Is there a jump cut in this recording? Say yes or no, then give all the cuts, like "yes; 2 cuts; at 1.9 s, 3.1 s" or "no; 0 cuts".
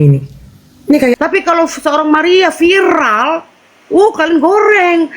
yes; 1 cut; at 1.2 s